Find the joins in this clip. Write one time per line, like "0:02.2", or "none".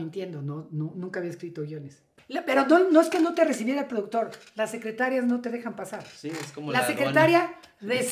0:02.1